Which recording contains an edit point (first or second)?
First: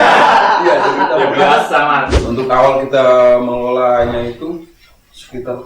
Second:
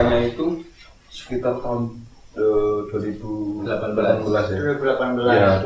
first